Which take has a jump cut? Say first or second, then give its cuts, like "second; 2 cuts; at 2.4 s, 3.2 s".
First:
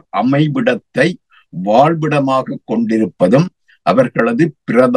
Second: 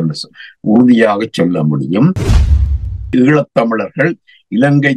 second; 1 cut; at 2.7 s